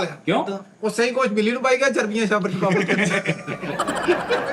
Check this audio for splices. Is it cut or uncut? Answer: uncut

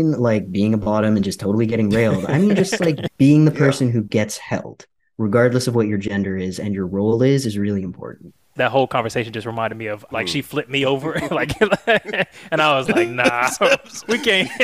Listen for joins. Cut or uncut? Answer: cut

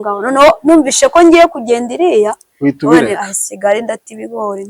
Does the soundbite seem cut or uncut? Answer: uncut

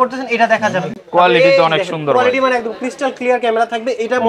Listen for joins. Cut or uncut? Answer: uncut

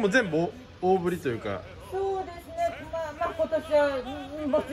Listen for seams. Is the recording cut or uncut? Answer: uncut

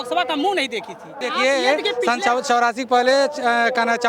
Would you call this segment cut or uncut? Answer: cut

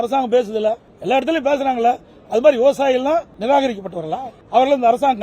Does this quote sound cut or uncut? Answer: cut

